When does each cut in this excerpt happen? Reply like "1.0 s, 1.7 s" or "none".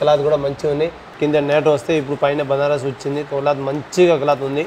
1.1 s